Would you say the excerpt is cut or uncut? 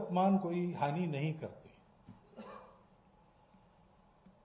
uncut